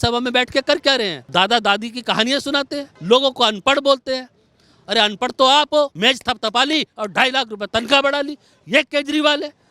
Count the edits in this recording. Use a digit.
3